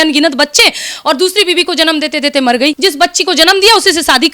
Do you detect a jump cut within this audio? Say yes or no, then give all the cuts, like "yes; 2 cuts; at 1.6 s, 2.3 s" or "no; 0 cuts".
yes; 1 cut; at 2.8 s